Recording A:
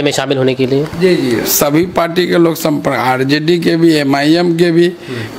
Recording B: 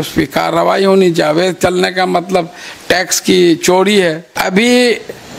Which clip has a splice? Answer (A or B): B